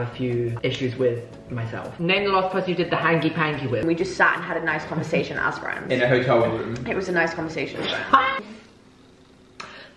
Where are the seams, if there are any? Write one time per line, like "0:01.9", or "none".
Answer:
0:01.9
0:03.8
0:08.5